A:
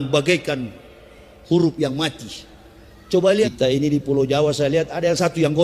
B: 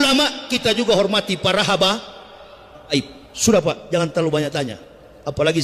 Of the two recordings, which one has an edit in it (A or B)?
A